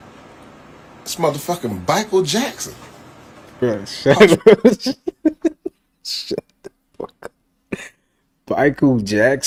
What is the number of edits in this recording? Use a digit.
0